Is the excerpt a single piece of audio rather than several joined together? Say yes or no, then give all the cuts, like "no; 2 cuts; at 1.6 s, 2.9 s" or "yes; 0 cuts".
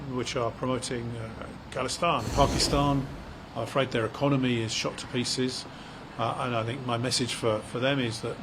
no; 1 cut; at 2.3 s